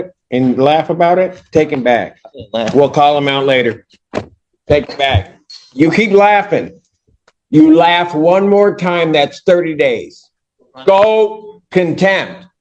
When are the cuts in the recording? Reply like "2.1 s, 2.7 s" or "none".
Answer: none